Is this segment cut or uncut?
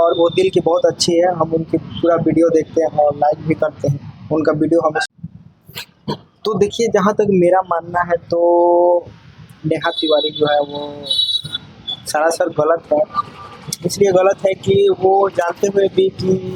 cut